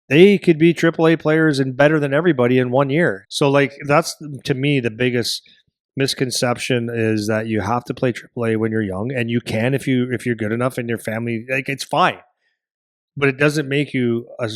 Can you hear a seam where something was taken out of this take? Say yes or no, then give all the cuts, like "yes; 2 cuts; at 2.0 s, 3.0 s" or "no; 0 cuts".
yes; 1 cut; at 3.2 s